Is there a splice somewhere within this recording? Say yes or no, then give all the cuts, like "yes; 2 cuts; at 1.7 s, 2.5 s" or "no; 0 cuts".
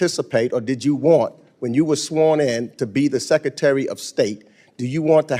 no; 0 cuts